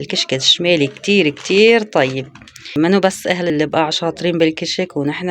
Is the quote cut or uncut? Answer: cut